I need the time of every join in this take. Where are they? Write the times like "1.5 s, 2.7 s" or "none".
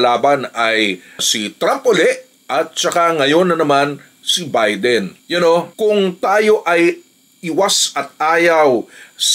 none